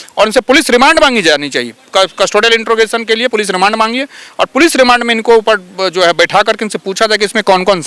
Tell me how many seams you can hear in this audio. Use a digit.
0